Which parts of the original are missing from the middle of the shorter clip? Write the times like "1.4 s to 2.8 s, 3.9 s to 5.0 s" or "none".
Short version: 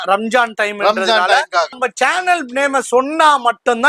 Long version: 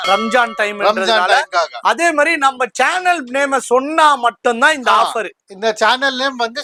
1.8 s to 2.6 s